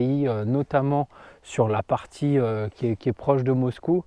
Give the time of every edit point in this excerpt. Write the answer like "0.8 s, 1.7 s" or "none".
none